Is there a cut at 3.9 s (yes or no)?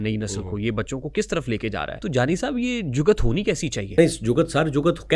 yes